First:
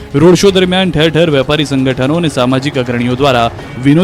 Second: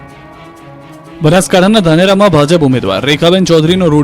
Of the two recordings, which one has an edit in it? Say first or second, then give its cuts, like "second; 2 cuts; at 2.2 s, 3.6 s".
second; 1 cut; at 1.0 s